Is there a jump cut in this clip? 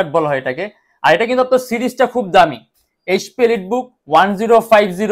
no; 0 cuts

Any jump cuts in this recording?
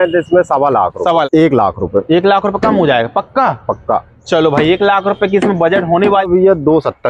yes; 2 cuts; at 1.3 s, 6.3 s

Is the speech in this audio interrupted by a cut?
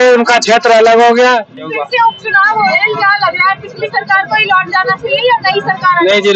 yes; 1 cut; at 1.8 s

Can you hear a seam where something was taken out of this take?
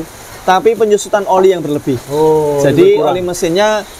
no; 0 cuts

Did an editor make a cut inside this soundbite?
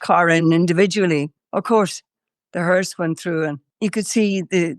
yes; 2 cuts; at 1.4 s, 3.6 s

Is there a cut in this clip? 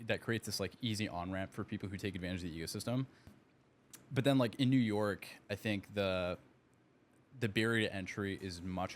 yes; 1 cut; at 3.4 s

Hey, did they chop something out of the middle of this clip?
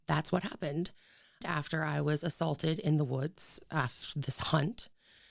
no; 0 cuts

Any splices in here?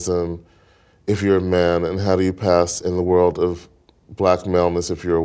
no; 0 cuts

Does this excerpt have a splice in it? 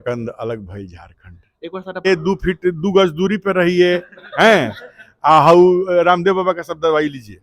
yes; 1 cut; at 2.1 s

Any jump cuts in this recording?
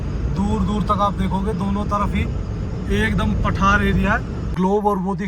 yes; 1 cut; at 4.4 s

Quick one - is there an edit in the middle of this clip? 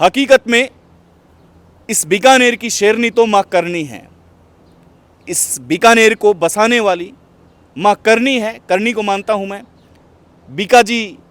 no; 0 cuts

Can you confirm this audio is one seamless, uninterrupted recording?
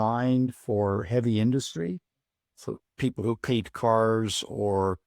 no; 1 cut; at 2.6 s

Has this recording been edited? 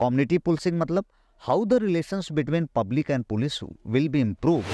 no; 0 cuts

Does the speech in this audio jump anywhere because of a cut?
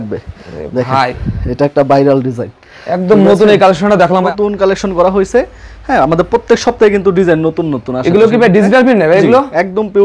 yes; 1 cut; at 4.2 s

